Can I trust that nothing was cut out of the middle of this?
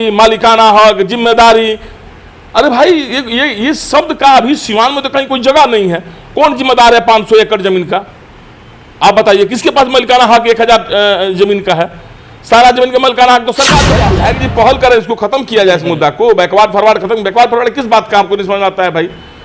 no; 1 cut; at 14.0 s

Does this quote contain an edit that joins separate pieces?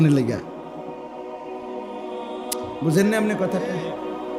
yes; 2 cuts; at 1.0 s, 2.8 s

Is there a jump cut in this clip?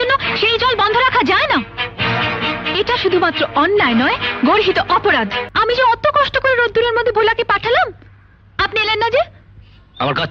yes; 1 cut; at 5.4 s

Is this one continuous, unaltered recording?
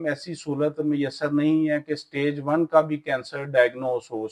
yes; 0 cuts

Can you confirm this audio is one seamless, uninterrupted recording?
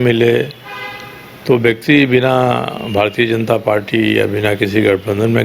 yes; 0 cuts

